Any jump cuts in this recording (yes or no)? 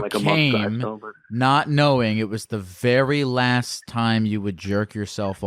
no